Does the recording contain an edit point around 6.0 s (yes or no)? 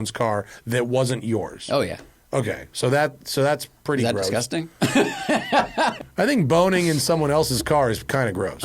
yes